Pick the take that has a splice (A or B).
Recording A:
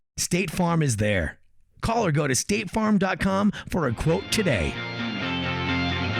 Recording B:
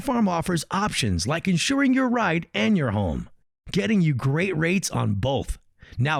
A